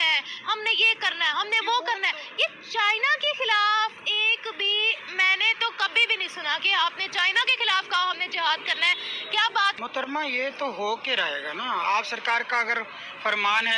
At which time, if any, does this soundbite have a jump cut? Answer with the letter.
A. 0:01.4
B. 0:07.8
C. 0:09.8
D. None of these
C